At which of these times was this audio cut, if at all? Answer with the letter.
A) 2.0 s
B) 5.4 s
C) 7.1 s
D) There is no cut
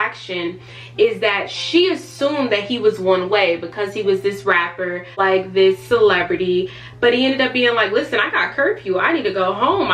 B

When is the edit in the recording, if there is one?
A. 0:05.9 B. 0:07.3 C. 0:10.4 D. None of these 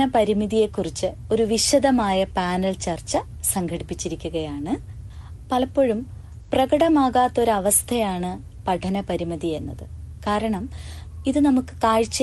A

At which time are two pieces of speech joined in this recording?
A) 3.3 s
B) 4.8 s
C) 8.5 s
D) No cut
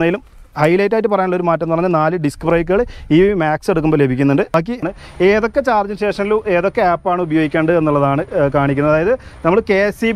B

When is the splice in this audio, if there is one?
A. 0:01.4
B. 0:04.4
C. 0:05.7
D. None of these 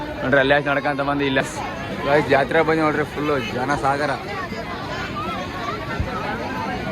A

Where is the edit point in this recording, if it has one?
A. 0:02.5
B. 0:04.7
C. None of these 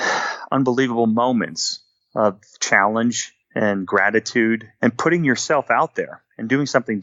B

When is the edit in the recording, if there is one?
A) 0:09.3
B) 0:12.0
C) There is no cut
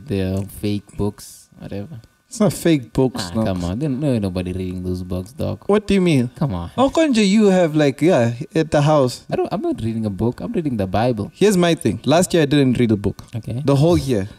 A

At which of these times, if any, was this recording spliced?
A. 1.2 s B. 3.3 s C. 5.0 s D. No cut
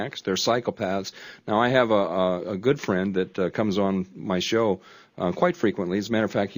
D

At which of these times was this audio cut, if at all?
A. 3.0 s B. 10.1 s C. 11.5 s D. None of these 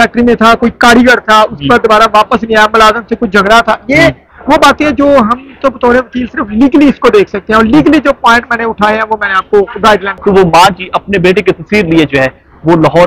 B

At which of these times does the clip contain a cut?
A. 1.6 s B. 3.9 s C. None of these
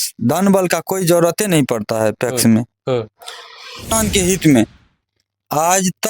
B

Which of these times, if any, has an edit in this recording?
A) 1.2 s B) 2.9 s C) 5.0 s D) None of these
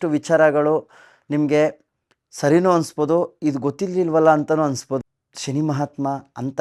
C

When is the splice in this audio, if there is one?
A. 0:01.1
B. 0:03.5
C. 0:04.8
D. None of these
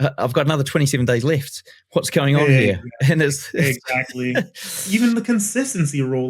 C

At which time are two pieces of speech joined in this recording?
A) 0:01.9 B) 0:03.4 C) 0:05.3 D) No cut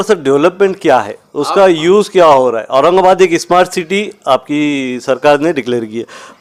D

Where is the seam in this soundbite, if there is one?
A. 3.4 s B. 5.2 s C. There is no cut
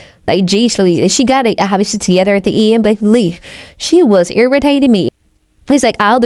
B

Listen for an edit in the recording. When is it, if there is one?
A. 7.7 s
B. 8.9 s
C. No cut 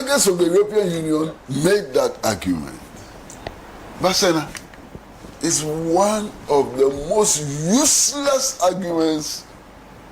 A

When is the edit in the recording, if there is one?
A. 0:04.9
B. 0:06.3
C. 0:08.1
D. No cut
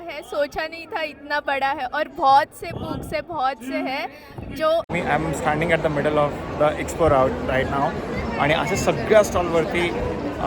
A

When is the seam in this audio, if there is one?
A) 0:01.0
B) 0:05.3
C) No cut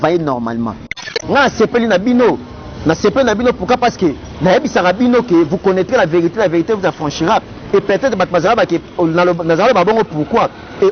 A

